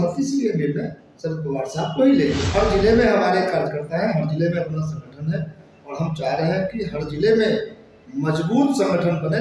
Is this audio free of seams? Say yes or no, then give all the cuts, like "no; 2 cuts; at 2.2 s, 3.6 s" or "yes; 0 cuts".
no; 1 cut; at 2.5 s